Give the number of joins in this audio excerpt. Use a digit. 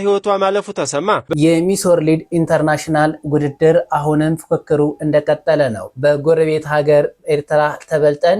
1